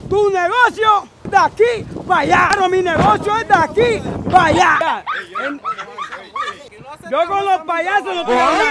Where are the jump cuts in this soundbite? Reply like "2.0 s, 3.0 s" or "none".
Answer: 1.1 s, 2.5 s, 4.8 s, 6.7 s